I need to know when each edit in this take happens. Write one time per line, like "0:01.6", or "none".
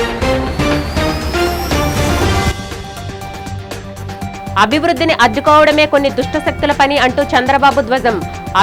none